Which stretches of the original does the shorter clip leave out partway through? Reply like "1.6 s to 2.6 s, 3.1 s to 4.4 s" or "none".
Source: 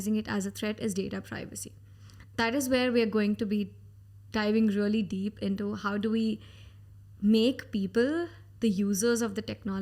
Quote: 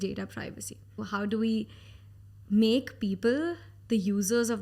2.0 s to 5.8 s